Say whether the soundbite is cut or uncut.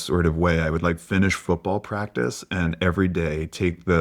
uncut